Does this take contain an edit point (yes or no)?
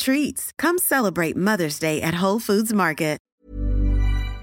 yes